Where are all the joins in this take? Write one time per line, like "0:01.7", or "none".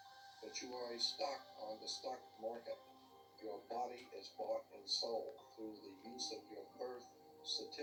none